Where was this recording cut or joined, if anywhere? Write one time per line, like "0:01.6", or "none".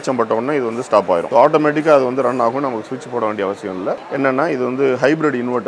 0:01.3
0:04.0